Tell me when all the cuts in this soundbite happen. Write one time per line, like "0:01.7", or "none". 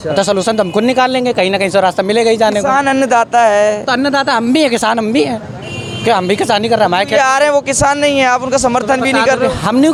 none